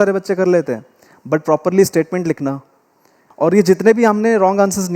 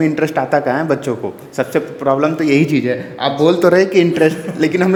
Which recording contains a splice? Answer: first; 1 cut; at 3.2 s

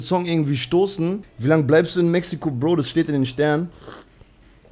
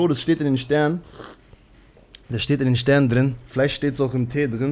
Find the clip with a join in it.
first; 1 cut; at 1.3 s

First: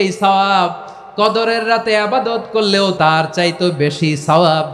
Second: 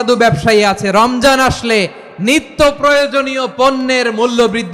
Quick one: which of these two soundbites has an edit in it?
first; 1 cut; at 2.9 s

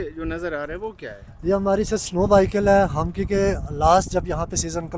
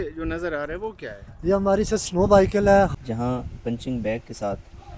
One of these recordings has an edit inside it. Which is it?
second; 1 cut; at 3.0 s

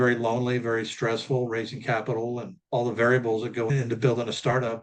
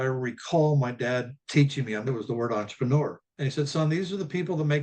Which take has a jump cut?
second; 1 cut; at 2.1 s

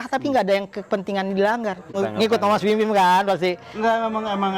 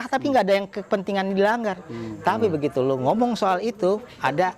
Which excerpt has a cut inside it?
first; 1 cut; at 1.9 s

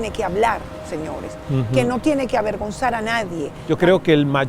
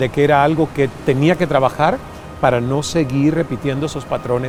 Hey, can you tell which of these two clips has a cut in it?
first; 1 cut; at 3.5 s

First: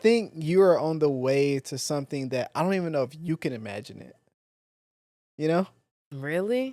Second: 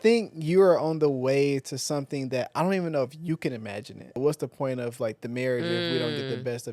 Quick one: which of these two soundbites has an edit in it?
second; 1 cut; at 4.2 s

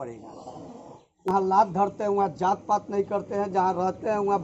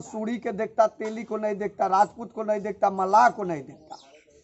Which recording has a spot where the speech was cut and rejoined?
first; 1 cut; at 1.3 s

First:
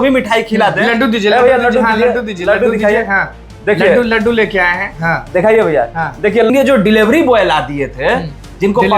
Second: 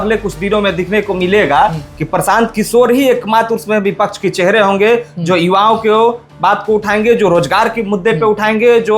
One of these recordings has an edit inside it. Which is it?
first; 1 cut; at 6.5 s

